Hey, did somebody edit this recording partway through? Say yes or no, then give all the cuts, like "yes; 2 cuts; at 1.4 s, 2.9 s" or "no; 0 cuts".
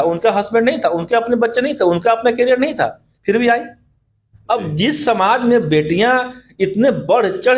no; 0 cuts